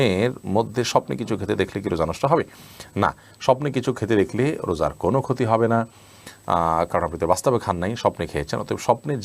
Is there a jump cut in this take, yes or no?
no